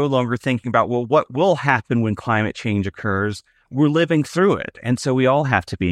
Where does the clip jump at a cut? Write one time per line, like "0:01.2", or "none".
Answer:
none